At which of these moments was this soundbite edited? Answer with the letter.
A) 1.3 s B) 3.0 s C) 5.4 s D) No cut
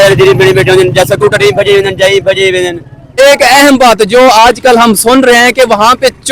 B